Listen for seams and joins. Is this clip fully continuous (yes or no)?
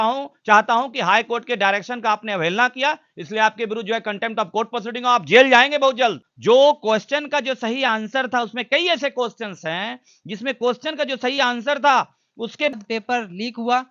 no